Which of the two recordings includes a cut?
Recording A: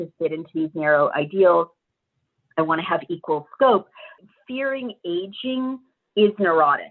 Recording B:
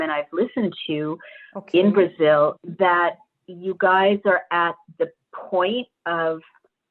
A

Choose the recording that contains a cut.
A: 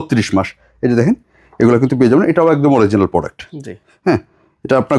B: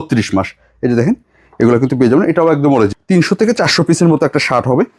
B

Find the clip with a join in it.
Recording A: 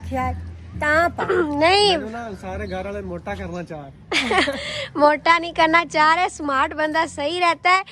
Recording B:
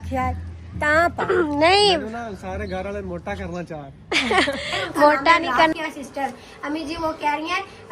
B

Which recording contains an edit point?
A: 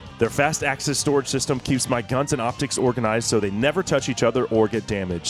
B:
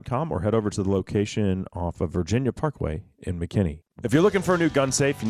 B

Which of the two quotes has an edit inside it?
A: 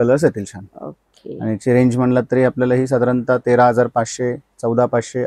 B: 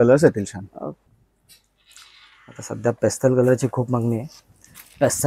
B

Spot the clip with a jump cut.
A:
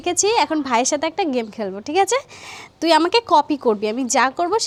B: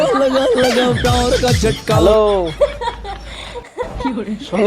B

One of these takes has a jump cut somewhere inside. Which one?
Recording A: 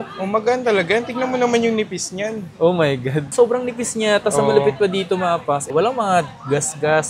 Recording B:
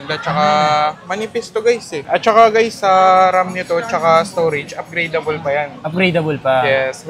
B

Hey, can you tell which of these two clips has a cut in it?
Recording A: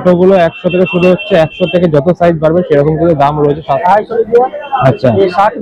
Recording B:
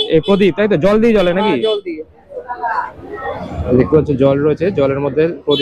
A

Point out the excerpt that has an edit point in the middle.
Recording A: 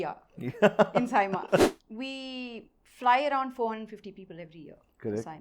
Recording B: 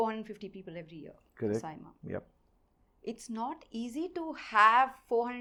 A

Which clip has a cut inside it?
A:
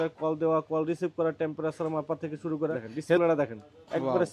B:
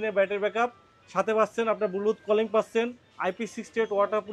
A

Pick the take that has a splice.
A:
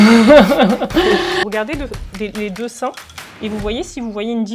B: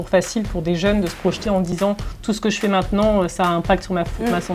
A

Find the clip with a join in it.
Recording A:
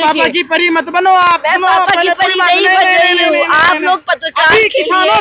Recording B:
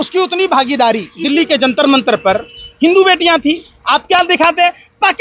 B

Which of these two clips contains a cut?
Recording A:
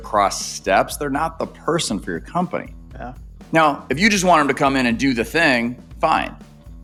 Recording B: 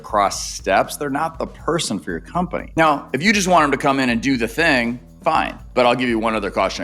B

